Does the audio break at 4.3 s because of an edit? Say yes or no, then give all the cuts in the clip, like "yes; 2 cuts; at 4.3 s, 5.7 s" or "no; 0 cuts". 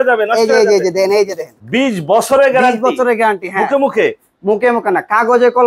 no; 1 cut; at 1.6 s